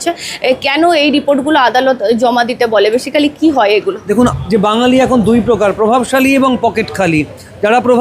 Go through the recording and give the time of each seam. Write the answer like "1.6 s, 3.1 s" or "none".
4.0 s